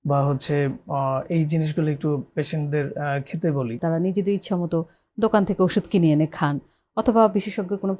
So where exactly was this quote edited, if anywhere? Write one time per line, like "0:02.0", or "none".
0:03.8